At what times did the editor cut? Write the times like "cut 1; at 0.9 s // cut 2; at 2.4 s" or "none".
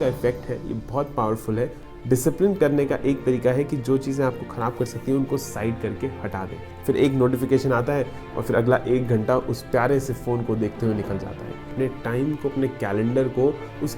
cut 1; at 1.8 s // cut 2; at 6.7 s // cut 3; at 11.7 s